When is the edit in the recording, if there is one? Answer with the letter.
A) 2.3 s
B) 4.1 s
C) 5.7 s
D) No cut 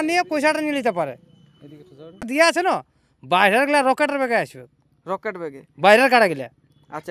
A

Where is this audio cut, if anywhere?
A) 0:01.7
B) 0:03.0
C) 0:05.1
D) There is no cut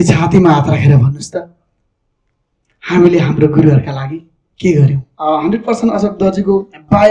C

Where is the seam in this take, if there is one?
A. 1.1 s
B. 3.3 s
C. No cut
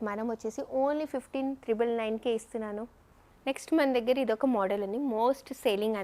B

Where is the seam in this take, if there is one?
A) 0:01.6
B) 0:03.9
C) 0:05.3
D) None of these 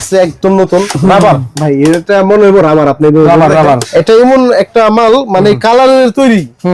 B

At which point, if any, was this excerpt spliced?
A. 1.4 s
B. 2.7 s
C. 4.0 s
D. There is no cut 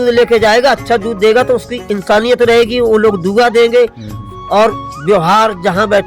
D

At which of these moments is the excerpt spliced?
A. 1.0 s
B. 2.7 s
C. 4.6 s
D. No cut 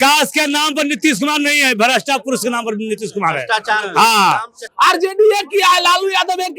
C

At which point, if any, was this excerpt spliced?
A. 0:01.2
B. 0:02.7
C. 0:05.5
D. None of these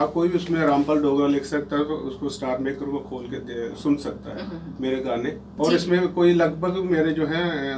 C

